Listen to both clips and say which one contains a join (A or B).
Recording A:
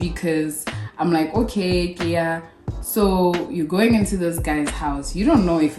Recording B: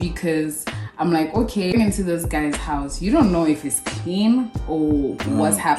B